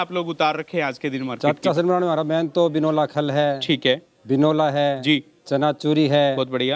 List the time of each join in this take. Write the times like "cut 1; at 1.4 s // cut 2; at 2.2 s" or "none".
none